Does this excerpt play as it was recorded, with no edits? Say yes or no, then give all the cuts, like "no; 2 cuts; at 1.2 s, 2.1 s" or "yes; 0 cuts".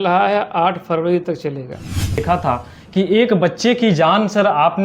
no; 1 cut; at 2.2 s